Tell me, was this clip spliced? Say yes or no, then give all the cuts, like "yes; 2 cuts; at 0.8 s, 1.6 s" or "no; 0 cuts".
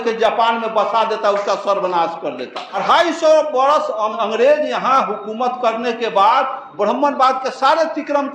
yes; 2 cuts; at 2.8 s, 4.1 s